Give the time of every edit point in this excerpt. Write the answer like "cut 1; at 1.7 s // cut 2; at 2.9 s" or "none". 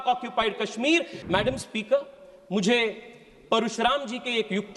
cut 1; at 1.2 s